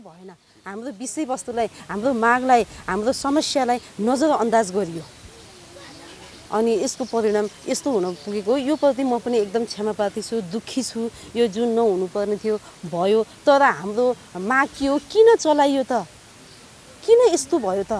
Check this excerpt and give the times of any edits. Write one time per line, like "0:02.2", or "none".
none

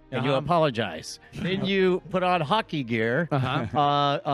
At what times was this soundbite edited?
0:01.5

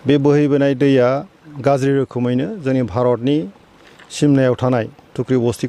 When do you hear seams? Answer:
none

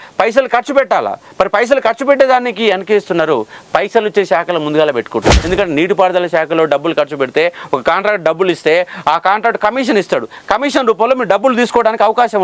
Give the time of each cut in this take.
0:05.4

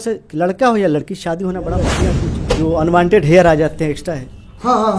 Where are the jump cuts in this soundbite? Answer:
0:02.0

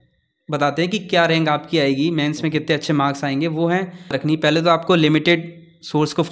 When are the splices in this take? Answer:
0:04.2

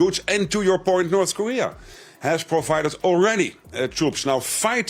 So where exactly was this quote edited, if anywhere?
none

